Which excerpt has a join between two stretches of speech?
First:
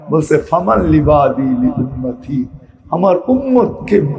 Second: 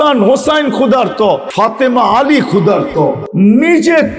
second; 2 cuts; at 1.5 s, 3.2 s

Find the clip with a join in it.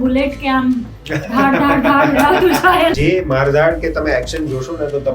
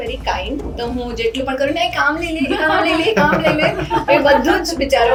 first; 1 cut; at 3.0 s

